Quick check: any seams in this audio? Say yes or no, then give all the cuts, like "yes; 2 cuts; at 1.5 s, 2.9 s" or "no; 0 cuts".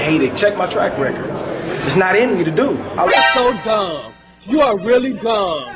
yes; 1 cut; at 3.1 s